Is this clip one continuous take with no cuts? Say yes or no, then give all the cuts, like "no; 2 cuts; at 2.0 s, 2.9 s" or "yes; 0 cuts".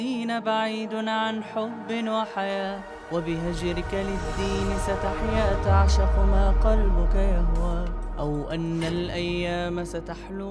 yes; 0 cuts